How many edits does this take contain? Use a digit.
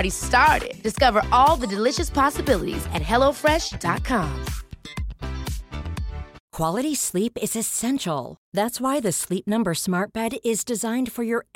1